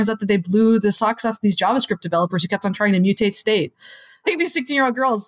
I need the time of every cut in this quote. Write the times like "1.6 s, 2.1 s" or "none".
4.2 s